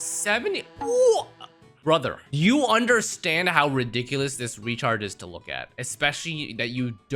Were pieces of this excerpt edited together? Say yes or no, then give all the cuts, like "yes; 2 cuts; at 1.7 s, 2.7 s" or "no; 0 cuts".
no; 0 cuts